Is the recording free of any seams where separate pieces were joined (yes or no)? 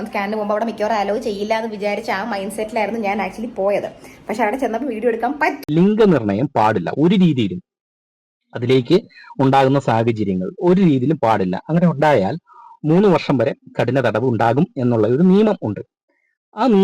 no